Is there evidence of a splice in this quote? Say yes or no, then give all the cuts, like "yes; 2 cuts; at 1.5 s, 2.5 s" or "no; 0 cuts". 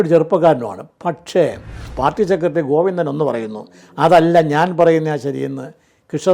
yes; 1 cut; at 1.8 s